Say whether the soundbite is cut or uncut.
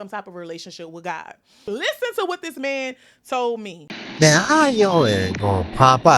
cut